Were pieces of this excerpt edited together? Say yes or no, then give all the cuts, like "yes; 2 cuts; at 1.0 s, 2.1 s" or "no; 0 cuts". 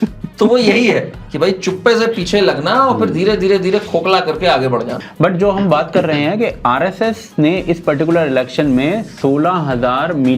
yes; 1 cut; at 5.0 s